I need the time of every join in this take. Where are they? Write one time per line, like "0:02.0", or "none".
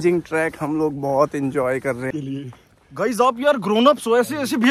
0:02.1